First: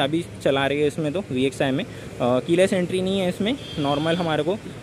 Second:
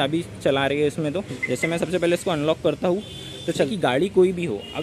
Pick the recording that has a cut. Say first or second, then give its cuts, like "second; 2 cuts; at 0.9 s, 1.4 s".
second; 2 cuts; at 1.3 s, 3.7 s